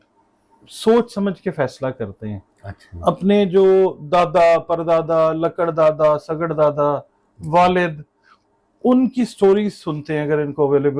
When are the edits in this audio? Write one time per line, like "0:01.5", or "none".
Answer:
none